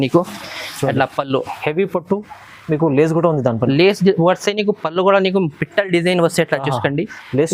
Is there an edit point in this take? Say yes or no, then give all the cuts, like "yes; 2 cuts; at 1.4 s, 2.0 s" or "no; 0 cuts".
no; 0 cuts